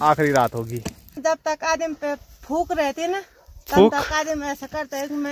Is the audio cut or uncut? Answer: cut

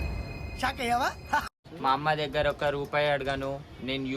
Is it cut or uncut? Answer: cut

